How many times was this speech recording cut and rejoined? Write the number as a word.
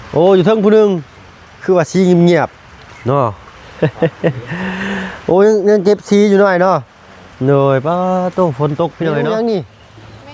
one